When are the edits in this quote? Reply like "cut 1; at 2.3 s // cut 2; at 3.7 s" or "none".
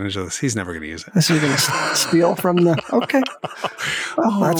cut 1; at 1.0 s